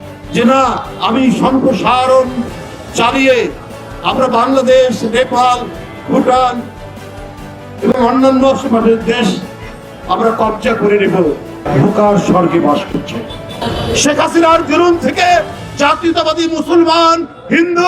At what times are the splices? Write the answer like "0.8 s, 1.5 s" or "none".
11.7 s, 13.6 s